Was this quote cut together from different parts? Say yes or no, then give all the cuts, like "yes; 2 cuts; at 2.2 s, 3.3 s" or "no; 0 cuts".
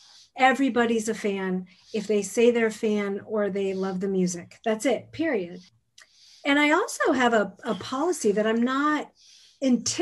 yes; 1 cut; at 5.7 s